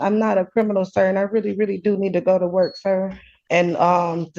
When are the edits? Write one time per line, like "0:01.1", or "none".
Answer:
0:03.5